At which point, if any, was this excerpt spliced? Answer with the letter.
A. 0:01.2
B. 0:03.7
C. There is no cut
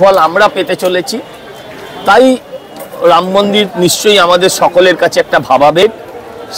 C